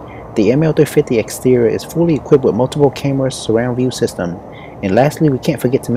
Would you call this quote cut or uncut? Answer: uncut